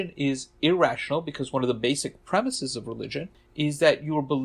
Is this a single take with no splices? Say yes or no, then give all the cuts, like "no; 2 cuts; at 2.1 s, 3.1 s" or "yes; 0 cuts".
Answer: no; 1 cut; at 3.4 s